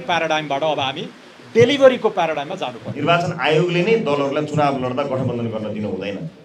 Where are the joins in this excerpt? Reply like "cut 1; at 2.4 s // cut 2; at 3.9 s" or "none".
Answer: cut 1; at 2.8 s